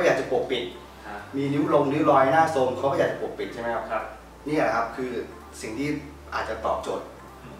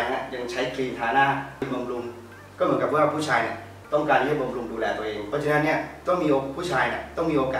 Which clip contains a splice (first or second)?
second